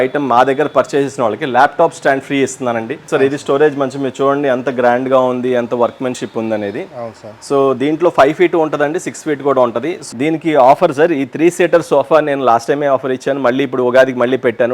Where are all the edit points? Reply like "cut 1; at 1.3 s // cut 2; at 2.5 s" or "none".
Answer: cut 1; at 2.9 s // cut 2; at 10.0 s